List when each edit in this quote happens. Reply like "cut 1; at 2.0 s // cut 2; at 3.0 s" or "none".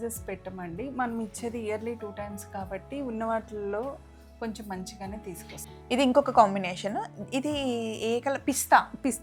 none